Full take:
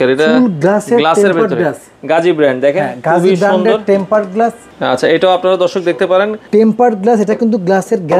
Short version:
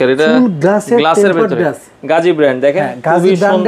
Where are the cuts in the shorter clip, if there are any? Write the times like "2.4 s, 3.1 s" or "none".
none